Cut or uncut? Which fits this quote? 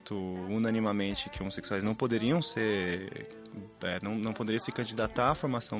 uncut